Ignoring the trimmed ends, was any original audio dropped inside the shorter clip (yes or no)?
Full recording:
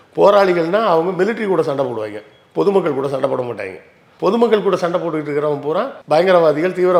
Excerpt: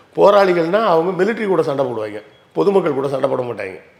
no